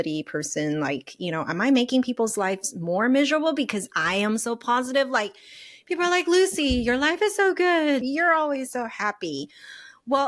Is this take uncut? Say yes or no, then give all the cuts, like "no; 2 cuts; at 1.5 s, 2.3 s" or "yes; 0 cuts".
no; 1 cut; at 8.1 s